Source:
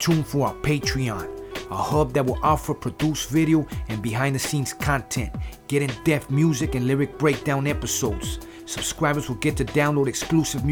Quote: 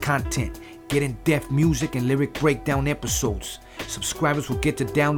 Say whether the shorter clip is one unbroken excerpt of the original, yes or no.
yes